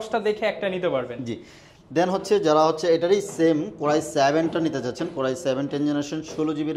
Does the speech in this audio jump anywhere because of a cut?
no; 0 cuts

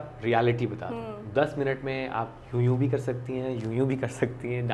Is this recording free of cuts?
yes; 0 cuts

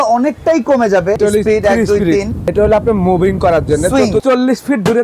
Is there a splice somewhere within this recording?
yes; 3 cuts; at 1.2 s, 2.4 s, 4.2 s

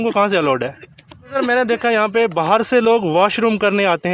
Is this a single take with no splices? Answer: no; 1 cut; at 1.3 s

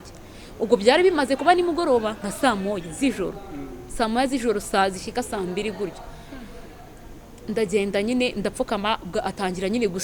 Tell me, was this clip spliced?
no; 0 cuts

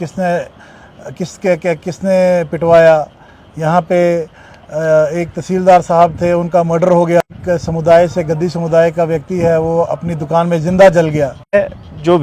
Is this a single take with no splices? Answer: no; 2 cuts; at 7.2 s, 11.5 s

